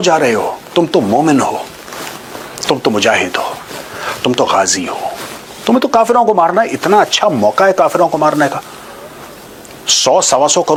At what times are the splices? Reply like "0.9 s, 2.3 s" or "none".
none